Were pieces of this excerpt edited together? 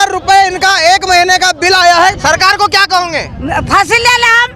yes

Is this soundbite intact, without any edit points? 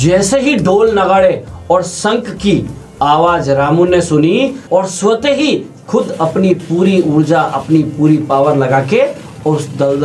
no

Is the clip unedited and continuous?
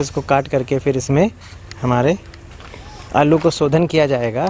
yes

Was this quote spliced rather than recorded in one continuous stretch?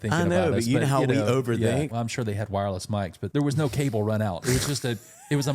yes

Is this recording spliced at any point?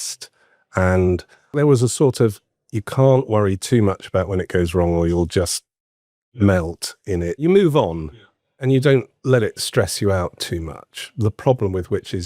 yes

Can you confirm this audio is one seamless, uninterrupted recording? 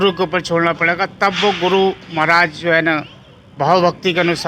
yes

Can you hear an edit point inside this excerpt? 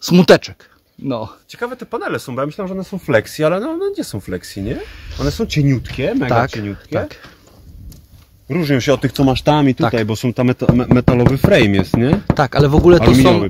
no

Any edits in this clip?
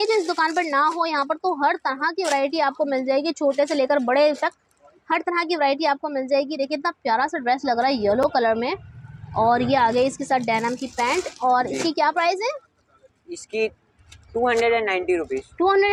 no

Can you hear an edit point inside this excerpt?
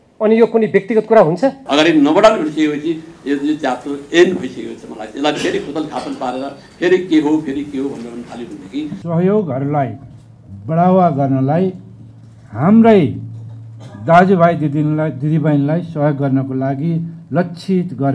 yes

